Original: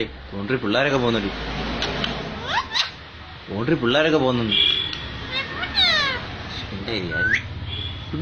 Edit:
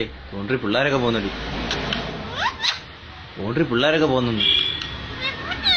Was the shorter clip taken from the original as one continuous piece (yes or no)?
no